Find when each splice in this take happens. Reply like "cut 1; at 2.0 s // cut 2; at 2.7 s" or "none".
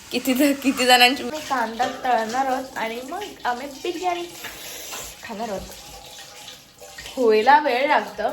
cut 1; at 1.2 s